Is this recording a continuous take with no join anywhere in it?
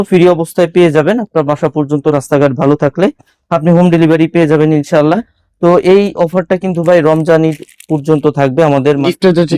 yes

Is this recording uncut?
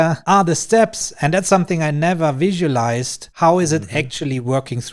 yes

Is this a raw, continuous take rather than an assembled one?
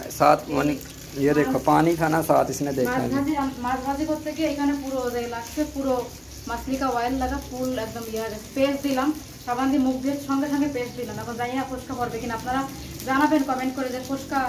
yes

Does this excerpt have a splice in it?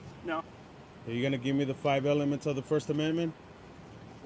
no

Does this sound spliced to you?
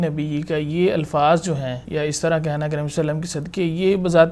yes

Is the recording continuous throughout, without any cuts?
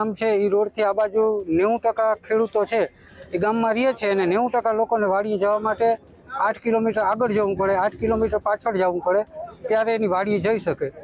yes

